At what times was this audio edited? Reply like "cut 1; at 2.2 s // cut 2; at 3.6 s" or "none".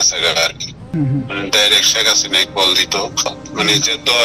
cut 1; at 0.9 s // cut 2; at 3.4 s